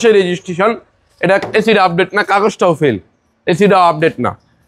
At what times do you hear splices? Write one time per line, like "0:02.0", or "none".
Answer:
none